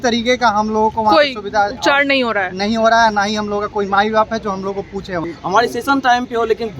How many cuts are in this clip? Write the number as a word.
one